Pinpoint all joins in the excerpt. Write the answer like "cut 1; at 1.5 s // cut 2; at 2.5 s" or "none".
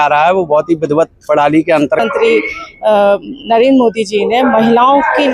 cut 1; at 2.0 s